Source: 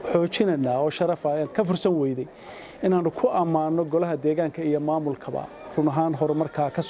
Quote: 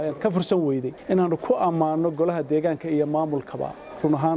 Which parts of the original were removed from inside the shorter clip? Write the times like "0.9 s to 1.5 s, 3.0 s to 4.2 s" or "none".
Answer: 2.3 s to 2.7 s